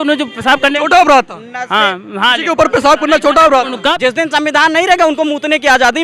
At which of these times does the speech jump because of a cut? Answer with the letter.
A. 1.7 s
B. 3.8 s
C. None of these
B